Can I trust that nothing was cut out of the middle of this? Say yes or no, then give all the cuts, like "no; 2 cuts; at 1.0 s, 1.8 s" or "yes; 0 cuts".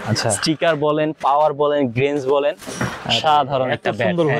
yes; 0 cuts